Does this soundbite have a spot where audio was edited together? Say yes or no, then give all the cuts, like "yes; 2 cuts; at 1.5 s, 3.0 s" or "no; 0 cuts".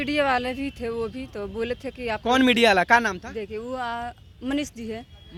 no; 0 cuts